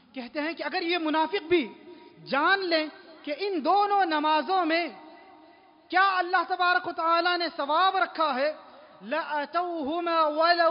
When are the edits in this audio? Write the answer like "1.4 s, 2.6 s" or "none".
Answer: none